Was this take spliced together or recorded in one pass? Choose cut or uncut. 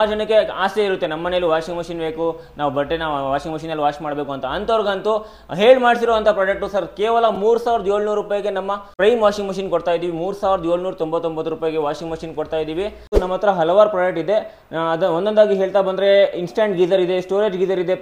cut